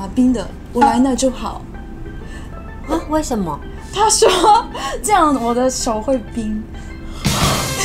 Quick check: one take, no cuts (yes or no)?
yes